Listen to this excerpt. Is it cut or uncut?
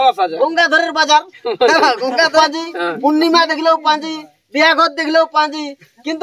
cut